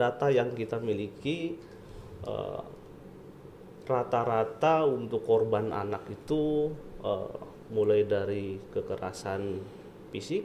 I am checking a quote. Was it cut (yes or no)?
no